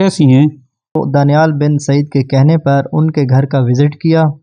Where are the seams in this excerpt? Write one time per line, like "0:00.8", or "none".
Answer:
0:01.0

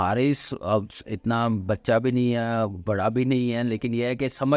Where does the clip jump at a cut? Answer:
none

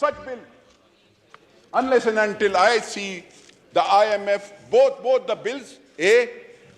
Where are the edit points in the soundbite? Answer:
none

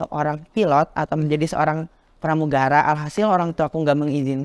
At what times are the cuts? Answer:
0:02.7

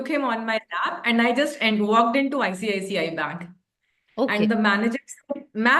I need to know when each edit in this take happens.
none

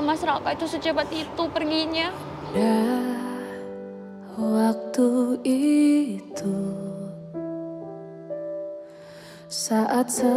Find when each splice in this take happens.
none

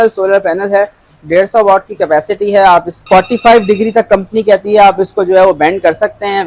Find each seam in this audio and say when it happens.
0:02.9

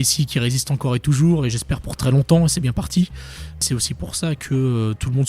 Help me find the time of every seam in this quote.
0:03.7

